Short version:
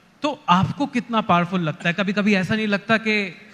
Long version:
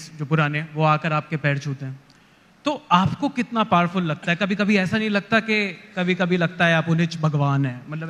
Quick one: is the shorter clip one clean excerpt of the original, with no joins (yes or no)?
yes